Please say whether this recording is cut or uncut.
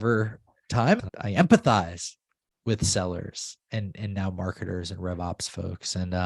cut